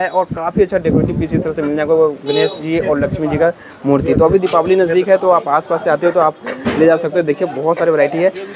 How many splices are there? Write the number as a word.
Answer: zero